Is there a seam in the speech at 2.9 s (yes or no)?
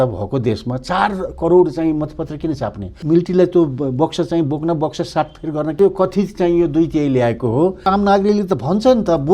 yes